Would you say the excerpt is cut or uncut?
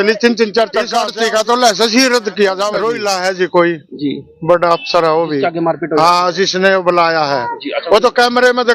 cut